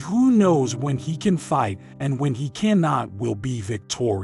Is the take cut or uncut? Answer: uncut